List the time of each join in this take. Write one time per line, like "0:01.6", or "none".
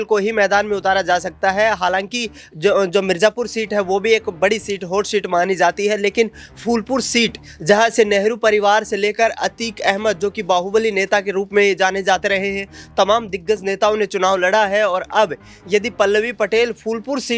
none